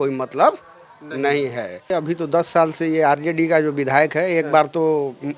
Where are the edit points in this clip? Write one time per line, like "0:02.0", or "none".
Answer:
0:01.9